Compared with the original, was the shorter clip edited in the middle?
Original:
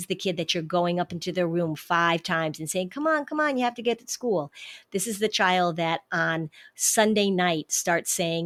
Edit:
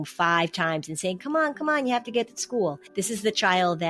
yes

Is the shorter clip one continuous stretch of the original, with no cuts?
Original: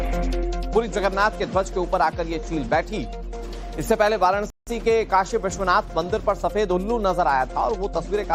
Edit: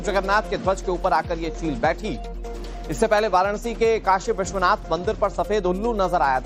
no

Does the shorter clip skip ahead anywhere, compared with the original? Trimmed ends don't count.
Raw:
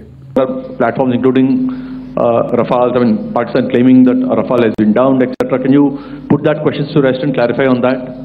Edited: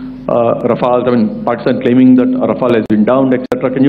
no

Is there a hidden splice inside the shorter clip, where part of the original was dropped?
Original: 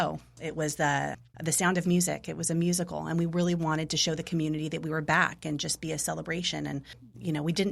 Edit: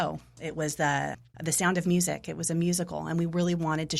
no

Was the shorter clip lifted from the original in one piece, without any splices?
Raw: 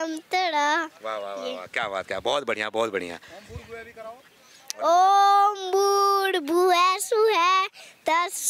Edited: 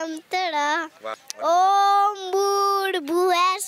no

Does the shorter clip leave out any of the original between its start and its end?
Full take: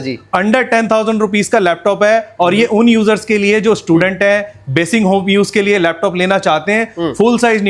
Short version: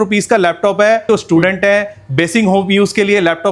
yes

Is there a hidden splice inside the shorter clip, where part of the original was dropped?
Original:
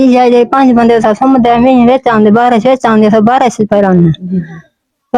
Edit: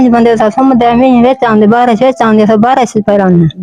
no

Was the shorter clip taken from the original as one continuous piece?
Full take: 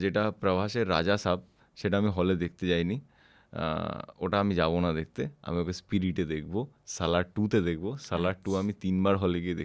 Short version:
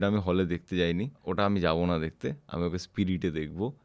no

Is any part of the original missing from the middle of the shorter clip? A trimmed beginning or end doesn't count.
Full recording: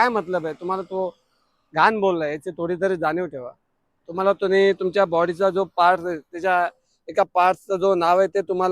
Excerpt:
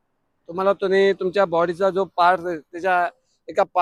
no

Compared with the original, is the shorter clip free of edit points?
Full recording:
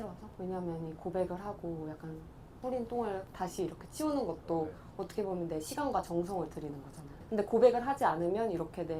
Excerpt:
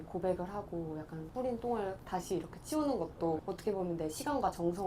no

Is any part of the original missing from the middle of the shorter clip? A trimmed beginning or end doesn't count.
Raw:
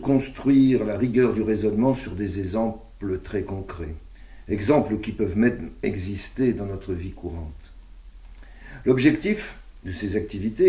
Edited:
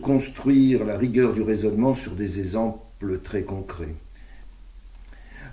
yes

